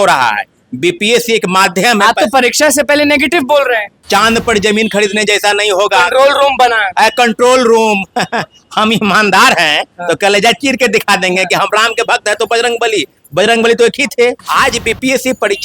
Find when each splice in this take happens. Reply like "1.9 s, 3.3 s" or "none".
3.9 s, 14.4 s